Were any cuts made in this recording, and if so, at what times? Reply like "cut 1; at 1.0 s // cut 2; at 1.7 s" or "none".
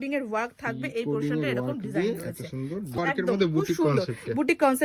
cut 1; at 3.0 s